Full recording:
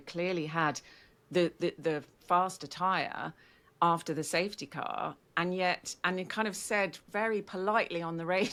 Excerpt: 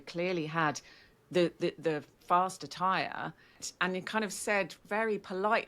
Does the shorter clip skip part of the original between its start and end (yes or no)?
yes